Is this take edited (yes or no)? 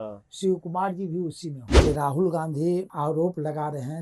yes